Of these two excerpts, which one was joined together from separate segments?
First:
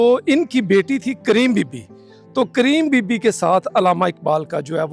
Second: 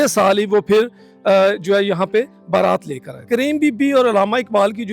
second; 1 cut; at 3.2 s

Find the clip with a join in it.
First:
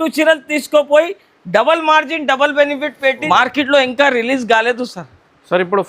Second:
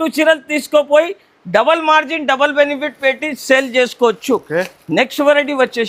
first; 1 cut; at 3.2 s

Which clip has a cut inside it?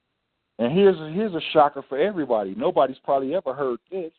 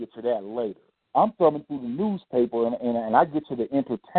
second; 1 cut; at 1.0 s

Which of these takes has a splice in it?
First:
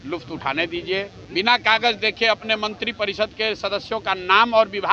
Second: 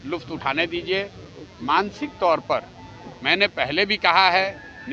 first; 1 cut; at 1.2 s

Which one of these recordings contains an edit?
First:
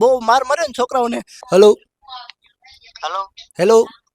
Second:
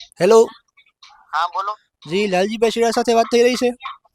first; 1 cut; at 1.3 s

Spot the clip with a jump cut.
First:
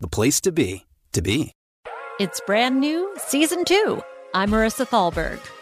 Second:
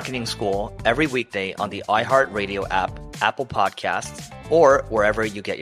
first; 1 cut; at 1.6 s

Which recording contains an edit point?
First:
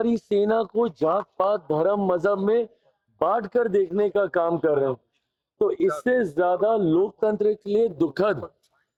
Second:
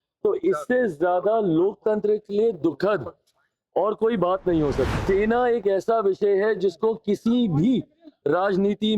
second; 1 cut; at 5.0 s

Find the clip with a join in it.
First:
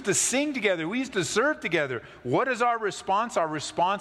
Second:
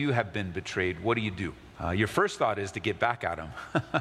second; 1 cut; at 1.7 s

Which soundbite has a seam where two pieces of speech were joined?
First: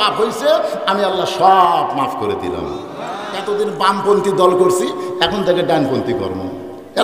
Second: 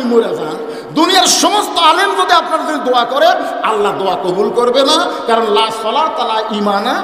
first; 1 cut; at 3.3 s

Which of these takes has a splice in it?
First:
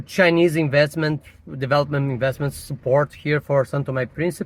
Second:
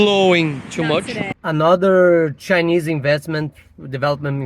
second; 1 cut; at 1.3 s

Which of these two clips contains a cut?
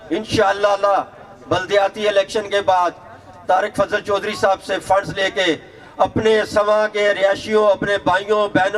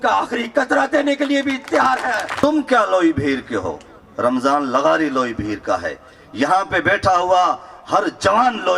second; 1 cut; at 2.3 s

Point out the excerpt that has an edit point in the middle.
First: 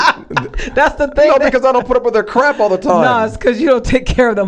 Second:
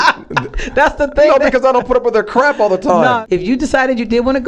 second; 1 cut; at 3.2 s

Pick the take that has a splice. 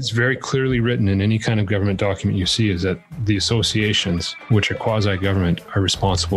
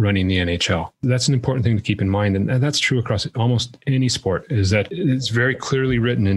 second; 1 cut; at 1.0 s

